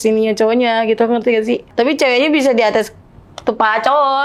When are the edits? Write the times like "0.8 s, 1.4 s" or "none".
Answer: 1.7 s